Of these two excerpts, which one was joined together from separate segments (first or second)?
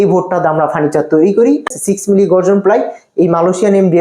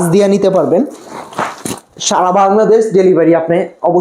first